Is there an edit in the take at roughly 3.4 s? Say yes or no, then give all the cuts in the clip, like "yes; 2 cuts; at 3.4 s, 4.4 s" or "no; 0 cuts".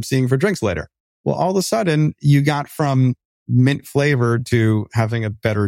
yes; 1 cut; at 3.4 s